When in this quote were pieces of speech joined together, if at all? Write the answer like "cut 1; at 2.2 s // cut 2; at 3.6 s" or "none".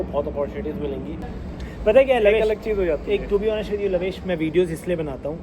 cut 1; at 1.1 s